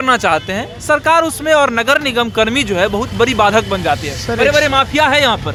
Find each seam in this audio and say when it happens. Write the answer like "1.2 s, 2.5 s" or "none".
none